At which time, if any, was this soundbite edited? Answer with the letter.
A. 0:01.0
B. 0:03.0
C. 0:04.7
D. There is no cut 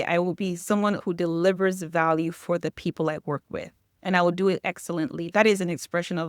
A